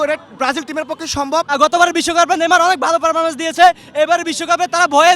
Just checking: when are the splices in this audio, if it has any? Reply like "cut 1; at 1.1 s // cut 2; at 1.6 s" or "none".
cut 1; at 1.5 s